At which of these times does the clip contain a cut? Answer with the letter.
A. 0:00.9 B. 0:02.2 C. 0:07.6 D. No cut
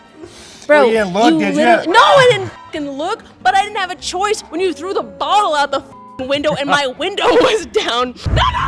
A